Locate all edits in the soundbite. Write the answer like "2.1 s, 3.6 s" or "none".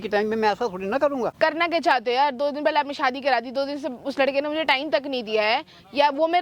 1.3 s